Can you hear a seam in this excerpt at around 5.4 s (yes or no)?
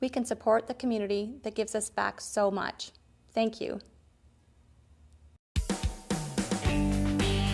yes